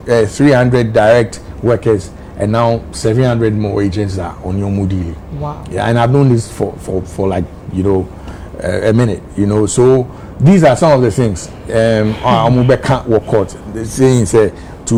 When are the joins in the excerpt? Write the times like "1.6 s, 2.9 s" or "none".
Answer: none